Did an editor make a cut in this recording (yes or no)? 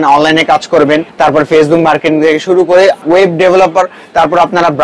yes